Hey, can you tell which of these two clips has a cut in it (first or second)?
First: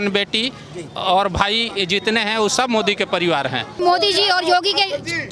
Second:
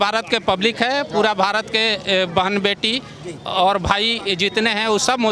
first